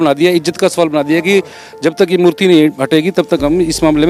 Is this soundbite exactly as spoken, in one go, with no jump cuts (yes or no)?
yes